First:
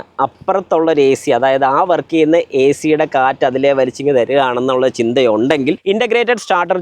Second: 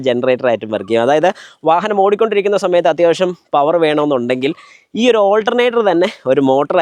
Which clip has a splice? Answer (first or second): first